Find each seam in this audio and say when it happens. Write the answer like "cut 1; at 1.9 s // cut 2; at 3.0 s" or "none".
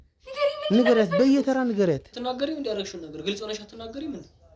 cut 1; at 2.2 s